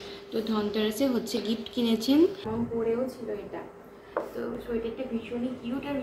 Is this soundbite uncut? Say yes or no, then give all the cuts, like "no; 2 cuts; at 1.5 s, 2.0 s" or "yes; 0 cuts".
no; 1 cut; at 2.4 s